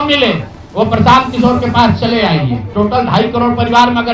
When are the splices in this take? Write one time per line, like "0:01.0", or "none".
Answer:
0:02.7